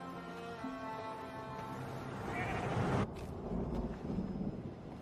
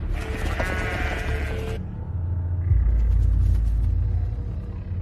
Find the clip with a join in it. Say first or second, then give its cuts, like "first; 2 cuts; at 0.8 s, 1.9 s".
first; 1 cut; at 3.1 s